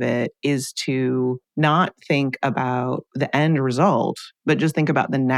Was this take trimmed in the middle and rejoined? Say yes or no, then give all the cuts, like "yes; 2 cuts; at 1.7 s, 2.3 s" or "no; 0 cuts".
yes; 3 cuts; at 1.4 s, 3.1 s, 4.3 s